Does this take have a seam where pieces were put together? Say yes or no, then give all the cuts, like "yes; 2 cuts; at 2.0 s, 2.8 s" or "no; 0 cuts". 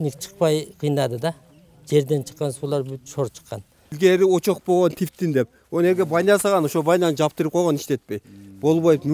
yes; 1 cut; at 3.9 s